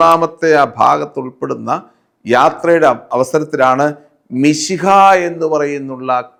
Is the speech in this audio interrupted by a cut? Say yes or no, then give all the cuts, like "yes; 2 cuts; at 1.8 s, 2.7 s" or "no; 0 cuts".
no; 0 cuts